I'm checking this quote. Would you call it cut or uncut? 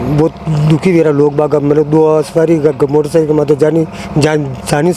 uncut